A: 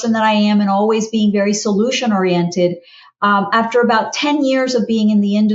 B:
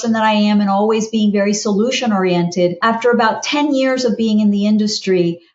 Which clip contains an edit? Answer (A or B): B